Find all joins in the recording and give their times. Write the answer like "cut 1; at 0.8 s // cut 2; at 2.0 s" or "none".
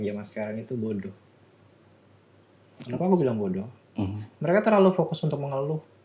none

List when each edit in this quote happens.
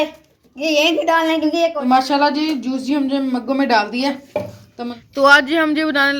cut 1; at 1.8 s // cut 2; at 4.9 s

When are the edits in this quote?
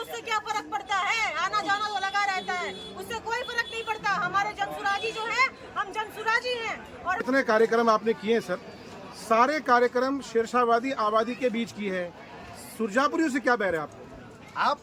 cut 1; at 7.2 s

